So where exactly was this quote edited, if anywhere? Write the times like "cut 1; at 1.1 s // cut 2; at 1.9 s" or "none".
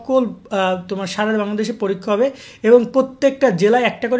none